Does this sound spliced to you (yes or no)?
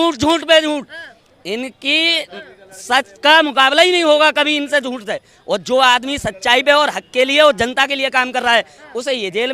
no